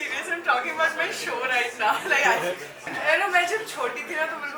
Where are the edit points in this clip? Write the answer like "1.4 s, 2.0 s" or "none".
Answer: 2.9 s